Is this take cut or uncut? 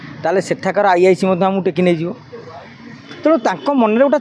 uncut